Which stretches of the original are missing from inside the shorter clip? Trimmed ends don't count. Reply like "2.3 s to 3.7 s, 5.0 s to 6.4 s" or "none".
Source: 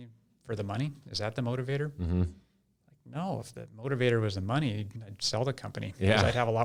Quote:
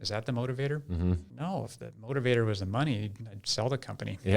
2.4 s to 3.0 s